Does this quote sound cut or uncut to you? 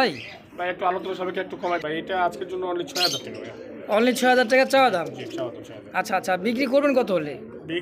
cut